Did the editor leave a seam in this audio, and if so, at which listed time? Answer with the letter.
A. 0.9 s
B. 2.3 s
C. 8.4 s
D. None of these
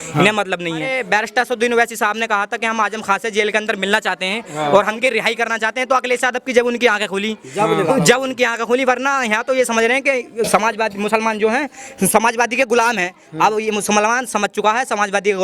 A